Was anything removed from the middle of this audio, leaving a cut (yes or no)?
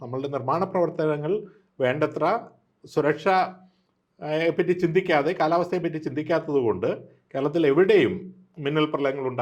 no